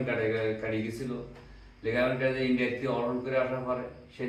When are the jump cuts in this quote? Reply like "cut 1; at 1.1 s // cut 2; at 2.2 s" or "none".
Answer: none